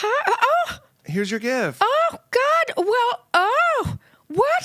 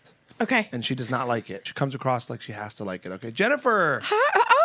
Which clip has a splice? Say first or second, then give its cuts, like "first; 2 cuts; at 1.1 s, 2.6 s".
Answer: second; 1 cut; at 1.7 s